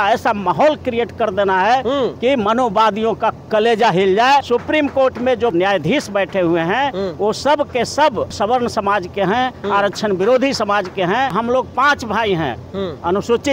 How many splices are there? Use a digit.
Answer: 4